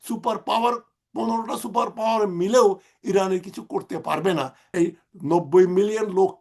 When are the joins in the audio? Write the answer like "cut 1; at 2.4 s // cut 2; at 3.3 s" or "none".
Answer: cut 1; at 4.6 s